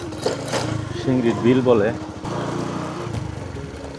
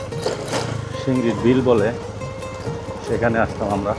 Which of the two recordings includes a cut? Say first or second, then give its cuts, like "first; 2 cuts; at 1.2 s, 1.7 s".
first; 1 cut; at 2.2 s